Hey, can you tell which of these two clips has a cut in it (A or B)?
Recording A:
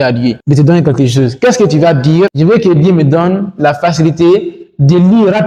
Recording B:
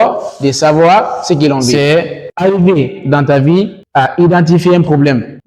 B